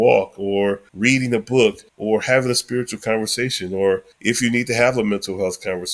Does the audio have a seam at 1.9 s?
yes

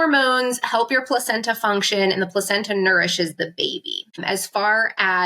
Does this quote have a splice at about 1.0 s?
no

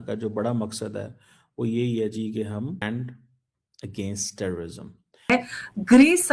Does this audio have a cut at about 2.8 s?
yes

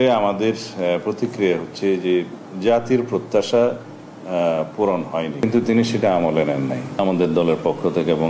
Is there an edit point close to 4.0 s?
no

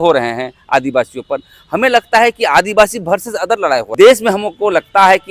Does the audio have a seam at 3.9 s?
yes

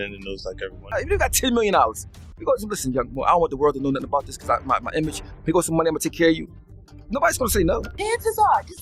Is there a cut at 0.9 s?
yes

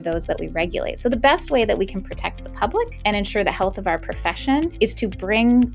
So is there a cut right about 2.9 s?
yes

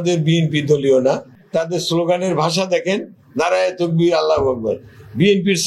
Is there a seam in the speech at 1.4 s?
yes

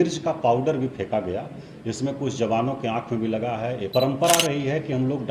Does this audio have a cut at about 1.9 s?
no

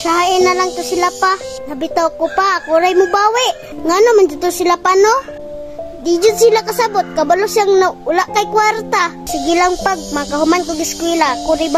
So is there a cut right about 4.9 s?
no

